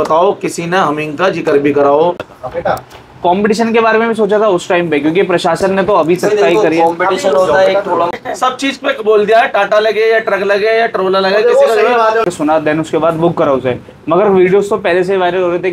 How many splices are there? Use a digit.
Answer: 3